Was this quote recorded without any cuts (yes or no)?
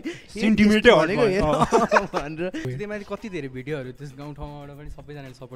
no